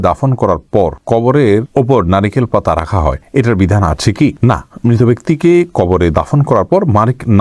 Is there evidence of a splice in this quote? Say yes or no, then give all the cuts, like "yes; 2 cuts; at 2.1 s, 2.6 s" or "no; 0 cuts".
no; 0 cuts